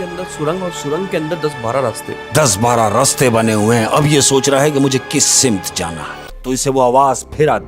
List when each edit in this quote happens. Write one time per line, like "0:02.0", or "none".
0:06.3